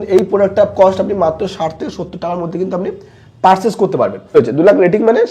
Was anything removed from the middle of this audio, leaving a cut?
yes; 1 cut; at 4.3 s

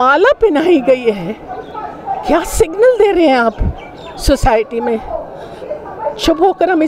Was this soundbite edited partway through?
no; 0 cuts

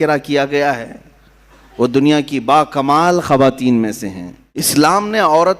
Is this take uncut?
no; 1 cut; at 4.7 s

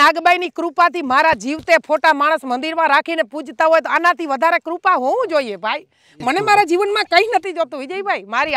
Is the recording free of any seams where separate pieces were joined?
yes; 0 cuts

